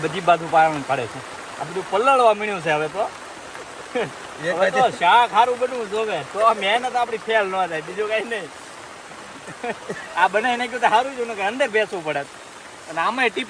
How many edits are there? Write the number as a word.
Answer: zero